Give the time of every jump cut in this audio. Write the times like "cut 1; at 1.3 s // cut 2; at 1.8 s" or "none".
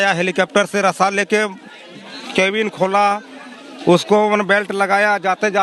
none